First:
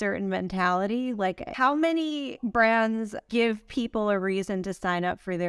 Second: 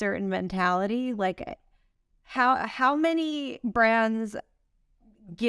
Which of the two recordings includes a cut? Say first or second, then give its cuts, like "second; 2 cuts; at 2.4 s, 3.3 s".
first; 2 cuts; at 1.5 s, 3.2 s